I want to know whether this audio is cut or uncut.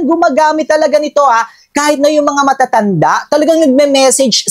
uncut